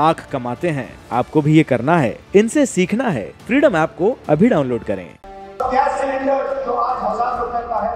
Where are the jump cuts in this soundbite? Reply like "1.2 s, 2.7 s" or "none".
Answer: 5.1 s